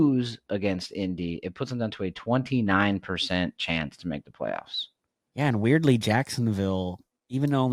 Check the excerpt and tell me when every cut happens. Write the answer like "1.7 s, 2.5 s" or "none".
none